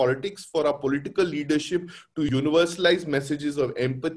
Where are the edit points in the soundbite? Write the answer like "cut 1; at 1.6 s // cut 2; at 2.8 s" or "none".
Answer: cut 1; at 2.3 s